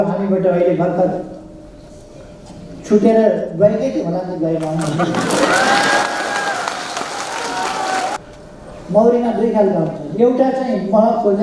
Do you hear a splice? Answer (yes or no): yes